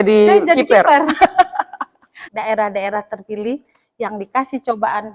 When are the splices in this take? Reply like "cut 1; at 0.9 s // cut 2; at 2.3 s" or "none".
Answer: cut 1; at 2.2 s